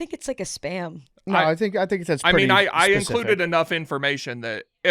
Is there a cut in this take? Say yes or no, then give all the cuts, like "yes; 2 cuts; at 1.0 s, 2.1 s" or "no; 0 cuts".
yes; 1 cut; at 1.1 s